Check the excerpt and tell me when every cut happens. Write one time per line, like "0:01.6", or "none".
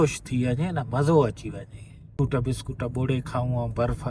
0:02.1